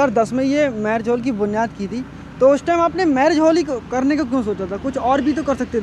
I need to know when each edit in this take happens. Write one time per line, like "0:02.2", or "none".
none